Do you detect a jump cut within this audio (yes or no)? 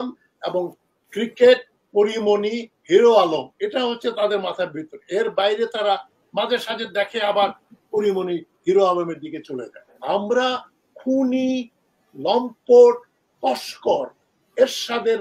yes